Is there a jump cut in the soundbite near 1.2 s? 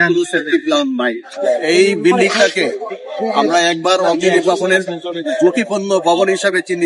yes; 1 cut; at 1.2 s

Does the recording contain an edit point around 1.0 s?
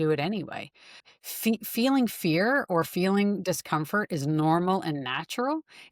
yes; 1 cut; at 1.0 s

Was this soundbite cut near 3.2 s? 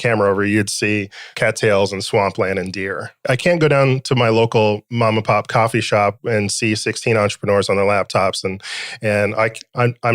yes; 2 cuts; at 1.2 s, 3.2 s

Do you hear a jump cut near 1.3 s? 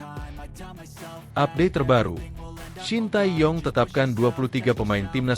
yes; 1 cut; at 1.3 s

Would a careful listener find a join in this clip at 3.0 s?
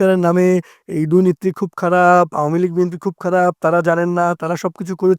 no; 0 cuts

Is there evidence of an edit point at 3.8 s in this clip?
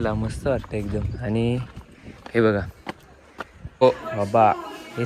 yes; 1 cut; at 3.8 s

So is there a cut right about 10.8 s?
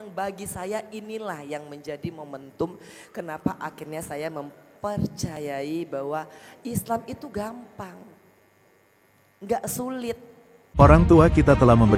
yes; 1 cut; at 10.8 s

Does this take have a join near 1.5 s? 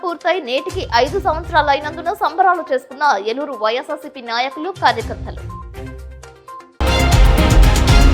no; 1 cut; at 6.8 s

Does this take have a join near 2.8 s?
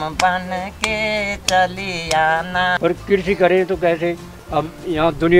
yes; 2 cuts; at 2.8 s, 4.3 s

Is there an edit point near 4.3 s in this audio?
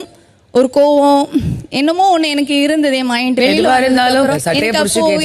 yes; 2 cuts; at 3.4 s, 4.3 s

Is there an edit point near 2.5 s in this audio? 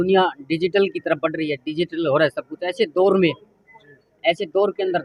no; 0 cuts

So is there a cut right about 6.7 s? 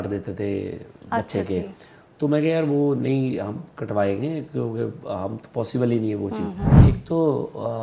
yes; 1 cut; at 6.7 s

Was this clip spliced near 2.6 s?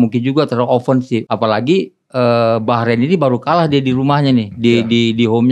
no; 1 cut; at 1.2 s

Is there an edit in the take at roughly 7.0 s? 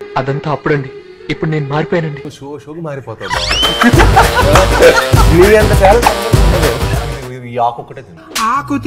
yes; 1 cut; at 7.0 s

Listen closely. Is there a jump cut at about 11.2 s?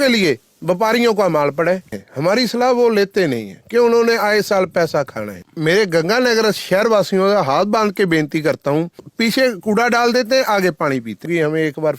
yes; 4 cuts; at 2.0 s, 5.5 s, 9.1 s, 11.2 s

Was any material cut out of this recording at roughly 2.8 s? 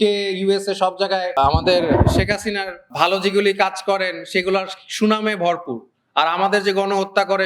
yes; 2 cuts; at 1.3 s, 2.8 s

